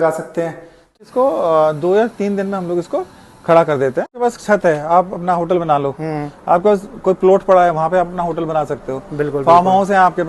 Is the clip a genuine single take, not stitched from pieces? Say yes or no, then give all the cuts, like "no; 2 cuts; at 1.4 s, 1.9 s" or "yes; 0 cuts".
no; 2 cuts; at 0.9 s, 4.2 s